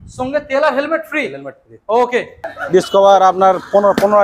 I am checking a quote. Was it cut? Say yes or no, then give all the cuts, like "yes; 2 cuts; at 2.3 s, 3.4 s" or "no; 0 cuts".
yes; 1 cut; at 2.5 s